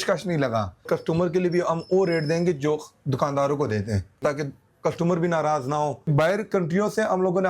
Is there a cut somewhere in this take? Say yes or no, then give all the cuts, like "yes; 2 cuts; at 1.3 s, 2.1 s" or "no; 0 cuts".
yes; 3 cuts; at 0.8 s, 4.2 s, 6.1 s